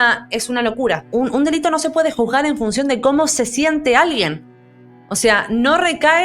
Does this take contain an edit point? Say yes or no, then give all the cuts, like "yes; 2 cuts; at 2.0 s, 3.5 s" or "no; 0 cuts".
yes; 1 cut; at 1.0 s